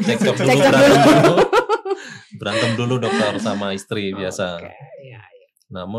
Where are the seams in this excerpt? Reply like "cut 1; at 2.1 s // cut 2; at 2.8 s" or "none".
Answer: none